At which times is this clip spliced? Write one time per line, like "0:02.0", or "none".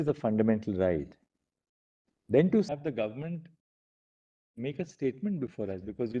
0:02.7